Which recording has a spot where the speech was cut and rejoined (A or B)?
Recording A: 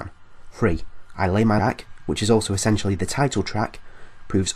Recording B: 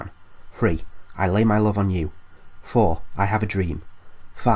B